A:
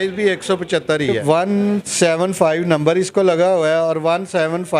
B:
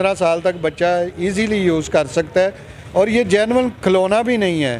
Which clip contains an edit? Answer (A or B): A